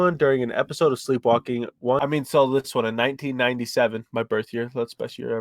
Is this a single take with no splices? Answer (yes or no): no